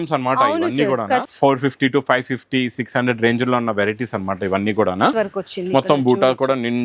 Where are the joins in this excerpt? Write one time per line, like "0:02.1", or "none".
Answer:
0:01.3
0:05.1